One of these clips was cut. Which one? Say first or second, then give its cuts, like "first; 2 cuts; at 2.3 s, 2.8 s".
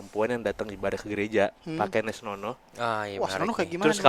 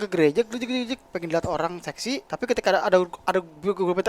second; 1 cut; at 2.3 s